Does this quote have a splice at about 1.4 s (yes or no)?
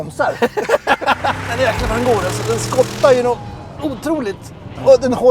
yes